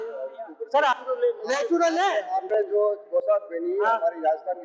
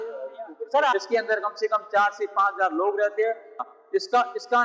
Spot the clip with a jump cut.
second; 2 cuts; at 0.9 s, 3.6 s

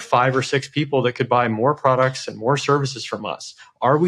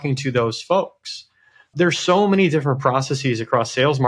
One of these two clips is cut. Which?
second; 1 cut; at 1.7 s

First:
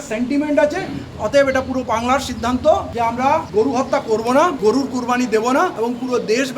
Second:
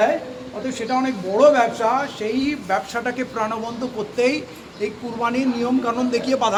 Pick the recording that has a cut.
first; 4 cuts; at 1.1 s, 3.2 s, 4.6 s, 5.7 s

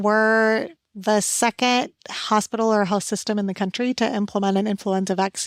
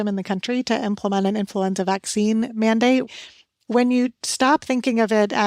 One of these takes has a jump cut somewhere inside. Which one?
second; 1 cut; at 3.1 s

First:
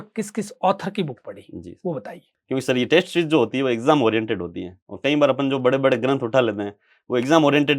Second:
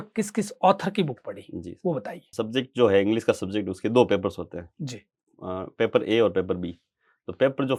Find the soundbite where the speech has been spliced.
first; 1 cut; at 2.2 s

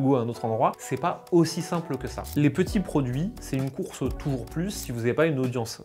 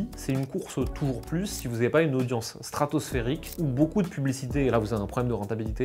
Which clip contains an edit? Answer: first; 1 cut; at 2.2 s

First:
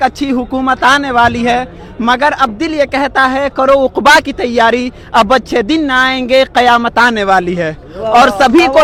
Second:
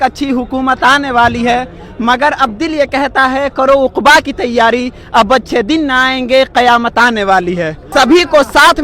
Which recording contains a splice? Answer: second; 1 cut; at 7.8 s

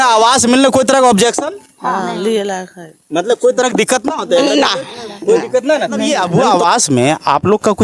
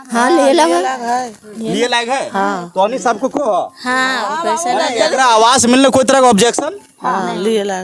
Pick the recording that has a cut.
first; 1 cut; at 6.0 s

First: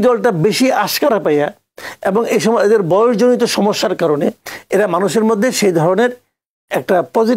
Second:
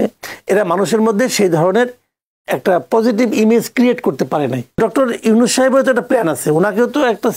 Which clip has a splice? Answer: second; 1 cut; at 4.8 s

